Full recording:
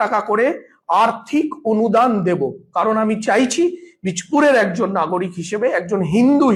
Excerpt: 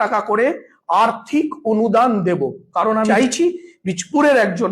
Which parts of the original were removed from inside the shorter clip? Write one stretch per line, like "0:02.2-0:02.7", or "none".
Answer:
0:03.1-0:03.3